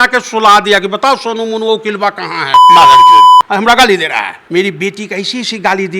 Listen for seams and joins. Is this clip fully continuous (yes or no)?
no